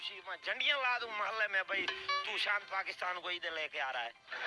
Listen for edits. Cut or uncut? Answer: uncut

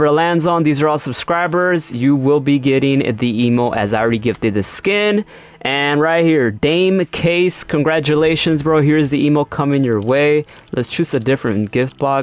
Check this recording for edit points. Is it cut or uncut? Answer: uncut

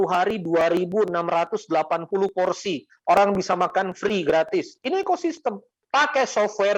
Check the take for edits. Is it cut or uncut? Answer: cut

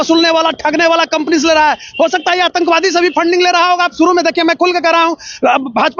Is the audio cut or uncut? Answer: uncut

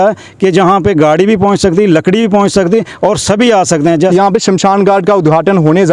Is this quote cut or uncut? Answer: cut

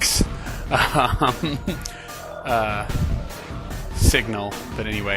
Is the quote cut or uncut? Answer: cut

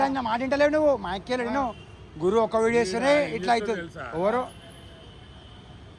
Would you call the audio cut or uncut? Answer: uncut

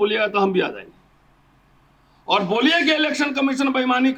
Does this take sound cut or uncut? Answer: uncut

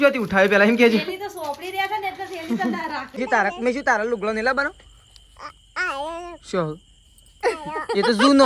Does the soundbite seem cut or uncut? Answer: cut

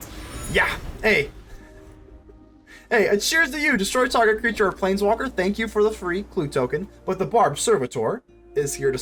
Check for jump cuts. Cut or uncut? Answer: uncut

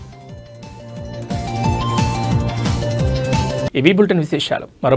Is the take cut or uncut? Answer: uncut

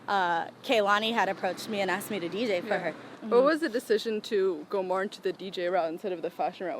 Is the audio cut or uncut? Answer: uncut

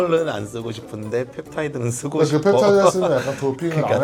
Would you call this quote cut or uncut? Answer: uncut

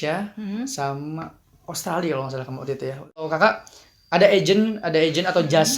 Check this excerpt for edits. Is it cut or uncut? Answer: cut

